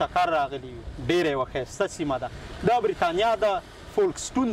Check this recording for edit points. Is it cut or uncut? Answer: uncut